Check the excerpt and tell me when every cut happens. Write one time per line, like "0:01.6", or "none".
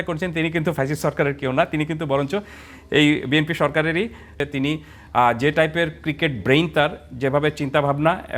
0:04.4